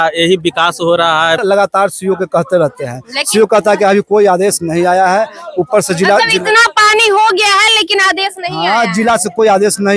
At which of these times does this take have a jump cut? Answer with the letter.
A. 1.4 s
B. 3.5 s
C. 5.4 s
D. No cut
A